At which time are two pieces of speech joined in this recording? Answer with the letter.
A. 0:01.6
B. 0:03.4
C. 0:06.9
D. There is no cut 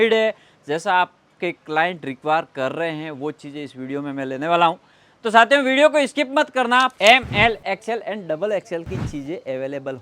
C